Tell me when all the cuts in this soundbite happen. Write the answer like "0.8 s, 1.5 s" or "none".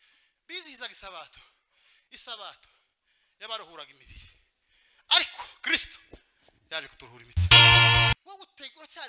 8.1 s